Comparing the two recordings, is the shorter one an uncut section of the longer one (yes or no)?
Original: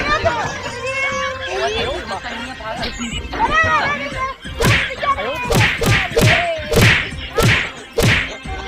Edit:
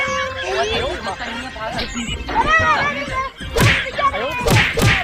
yes